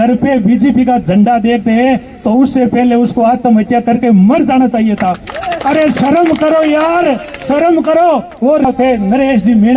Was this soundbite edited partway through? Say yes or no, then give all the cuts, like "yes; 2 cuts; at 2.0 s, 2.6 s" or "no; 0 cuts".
yes; 1 cut; at 8.7 s